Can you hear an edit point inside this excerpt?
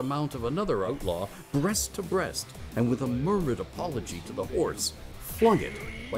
yes; 1 cut; at 1.0 s

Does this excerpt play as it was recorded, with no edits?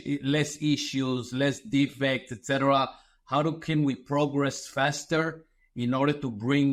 yes; 0 cuts

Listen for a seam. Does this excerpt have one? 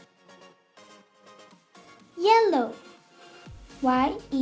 yes; 1 cut; at 2.1 s

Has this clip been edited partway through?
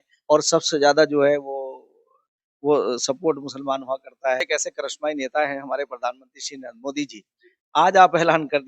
yes; 1 cut; at 4.5 s

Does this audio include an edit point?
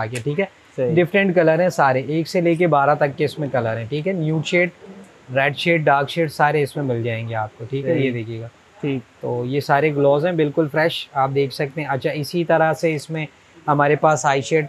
no; 0 cuts

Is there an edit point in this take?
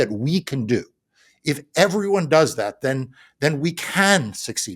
no; 0 cuts

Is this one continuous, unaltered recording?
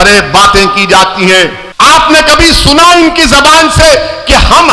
no; 1 cut; at 1.6 s

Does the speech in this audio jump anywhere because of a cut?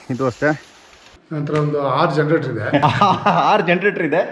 yes; 2 cuts; at 1.0 s, 2.8 s

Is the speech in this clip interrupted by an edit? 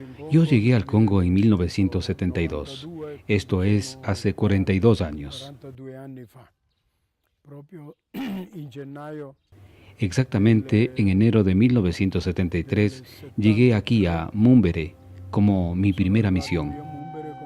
yes; 1 cut; at 3.2 s

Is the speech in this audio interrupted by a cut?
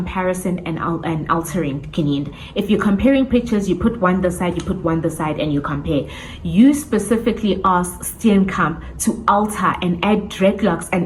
no; 0 cuts

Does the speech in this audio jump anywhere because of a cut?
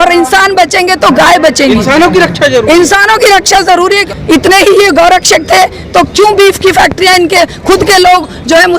yes; 1 cut; at 4.1 s

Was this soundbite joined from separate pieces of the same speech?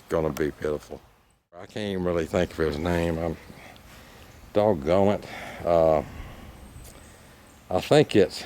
yes; 1 cut; at 1.8 s

